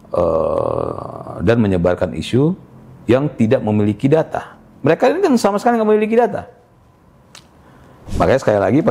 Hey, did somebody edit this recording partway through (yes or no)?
yes